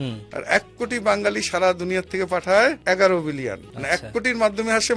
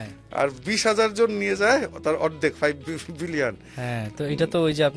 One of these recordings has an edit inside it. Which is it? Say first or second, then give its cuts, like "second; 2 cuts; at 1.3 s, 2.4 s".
first; 2 cuts; at 2.8 s, 3.7 s